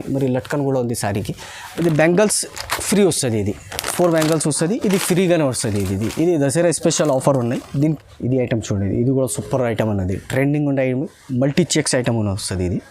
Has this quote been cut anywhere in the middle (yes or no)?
yes